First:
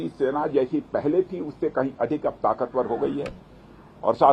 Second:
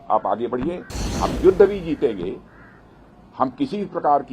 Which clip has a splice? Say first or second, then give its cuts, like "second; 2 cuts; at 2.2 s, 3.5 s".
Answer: second; 1 cut; at 0.9 s